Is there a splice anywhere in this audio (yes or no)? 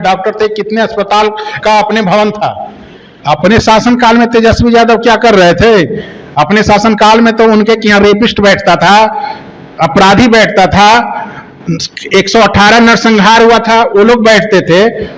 yes